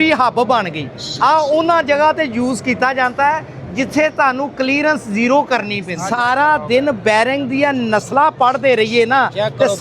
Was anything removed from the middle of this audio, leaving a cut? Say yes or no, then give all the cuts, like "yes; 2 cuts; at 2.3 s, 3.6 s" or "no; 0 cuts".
yes; 1 cut; at 5.9 s